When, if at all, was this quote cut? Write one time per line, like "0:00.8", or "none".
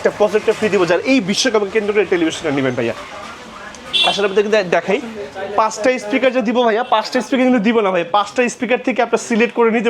none